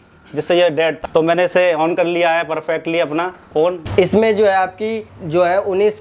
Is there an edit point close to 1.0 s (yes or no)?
yes